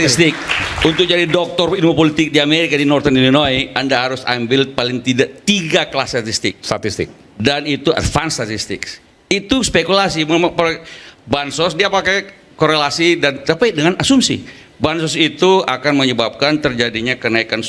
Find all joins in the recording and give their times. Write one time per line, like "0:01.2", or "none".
none